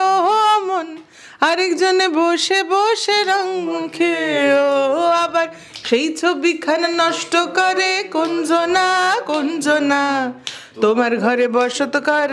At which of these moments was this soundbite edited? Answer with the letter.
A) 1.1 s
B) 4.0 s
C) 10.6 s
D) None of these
D